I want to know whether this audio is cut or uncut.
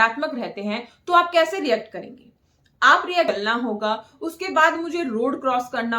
cut